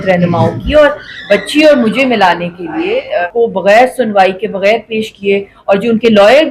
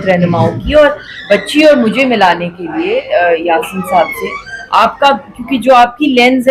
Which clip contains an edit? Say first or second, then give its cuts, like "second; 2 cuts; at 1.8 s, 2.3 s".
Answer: first; 1 cut; at 3.2 s